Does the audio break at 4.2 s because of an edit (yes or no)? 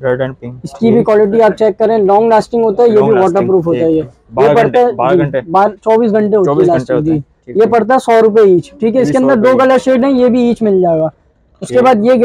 no